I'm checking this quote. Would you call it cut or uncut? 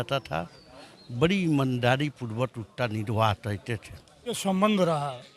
cut